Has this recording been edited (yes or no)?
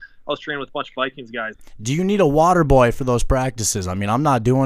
yes